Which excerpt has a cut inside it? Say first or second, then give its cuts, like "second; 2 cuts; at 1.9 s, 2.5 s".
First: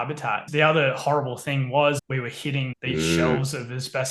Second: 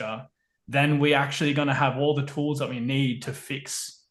first; 1 cut; at 2.0 s